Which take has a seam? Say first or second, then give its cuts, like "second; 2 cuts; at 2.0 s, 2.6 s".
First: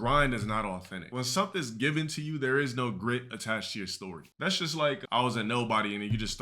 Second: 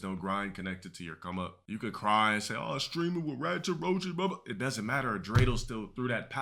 first; 1 cut; at 1.0 s